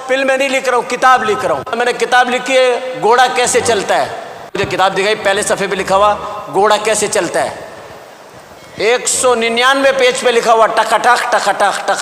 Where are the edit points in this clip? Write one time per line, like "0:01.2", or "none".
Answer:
0:01.8
0:04.5